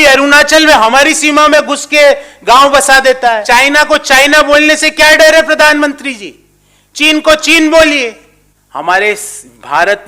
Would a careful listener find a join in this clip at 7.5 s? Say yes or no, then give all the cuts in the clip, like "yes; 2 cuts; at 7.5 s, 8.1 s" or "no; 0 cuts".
no; 2 cuts; at 3.4 s, 8.8 s